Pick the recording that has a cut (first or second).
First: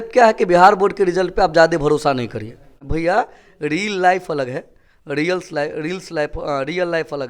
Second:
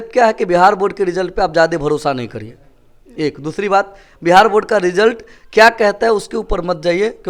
first